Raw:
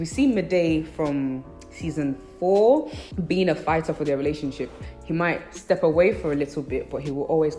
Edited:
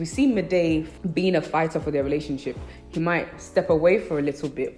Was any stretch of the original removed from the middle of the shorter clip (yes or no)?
yes